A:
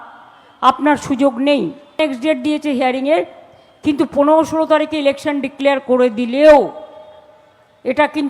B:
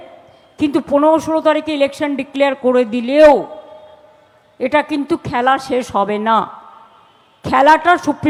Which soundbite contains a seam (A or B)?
A